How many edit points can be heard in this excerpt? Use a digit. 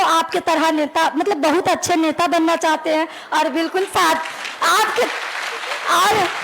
0